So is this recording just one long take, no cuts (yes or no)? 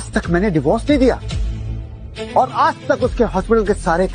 no